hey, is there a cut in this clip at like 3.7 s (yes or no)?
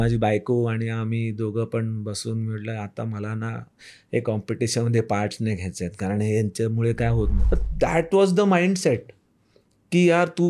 no